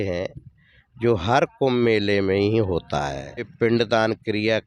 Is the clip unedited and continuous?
no; 1 cut; at 3.5 s

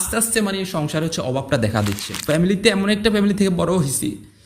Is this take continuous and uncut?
no; 1 cut; at 2.1 s

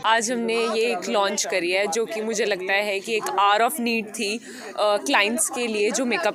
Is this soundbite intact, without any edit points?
yes; 0 cuts

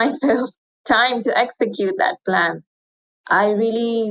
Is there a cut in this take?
yes; 1 cut; at 3.0 s

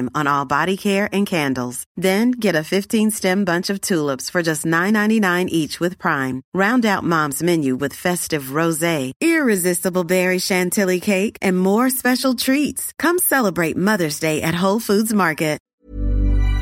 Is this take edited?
yes; 1 cut; at 15.7 s

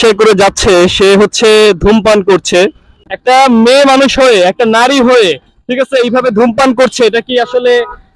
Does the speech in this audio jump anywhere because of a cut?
yes; 1 cut; at 3.1 s

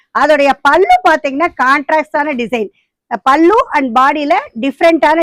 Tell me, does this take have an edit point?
no; 0 cuts

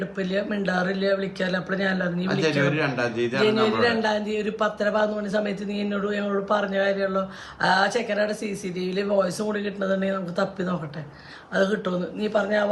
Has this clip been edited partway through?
no; 0 cuts

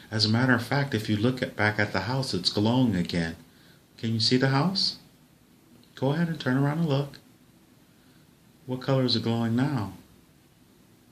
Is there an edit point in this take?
no; 0 cuts

